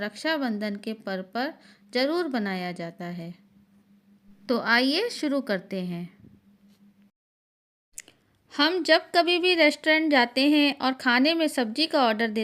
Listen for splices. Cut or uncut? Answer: cut